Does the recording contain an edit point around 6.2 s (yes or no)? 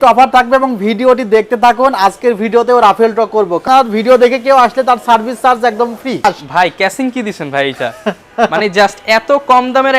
yes